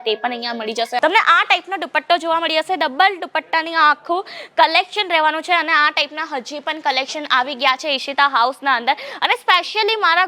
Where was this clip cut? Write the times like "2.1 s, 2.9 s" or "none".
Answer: 1.0 s